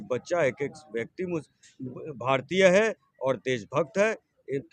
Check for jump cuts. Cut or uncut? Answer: uncut